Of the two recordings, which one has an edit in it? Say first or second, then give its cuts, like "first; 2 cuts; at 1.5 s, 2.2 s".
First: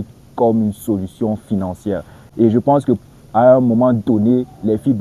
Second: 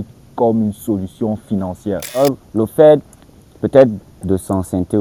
second; 1 cut; at 2.2 s